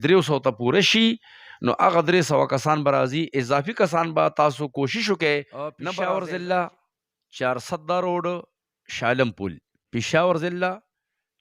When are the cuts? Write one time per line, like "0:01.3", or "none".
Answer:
0:05.8